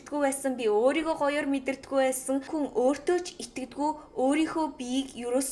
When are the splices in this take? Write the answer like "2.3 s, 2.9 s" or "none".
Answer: 2.5 s